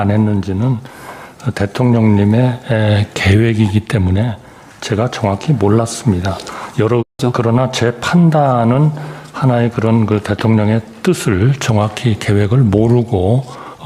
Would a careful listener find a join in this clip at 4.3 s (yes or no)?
no